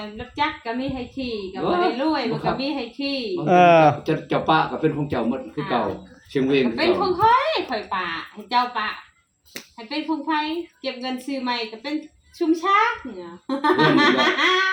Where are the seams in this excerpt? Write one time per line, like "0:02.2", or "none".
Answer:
none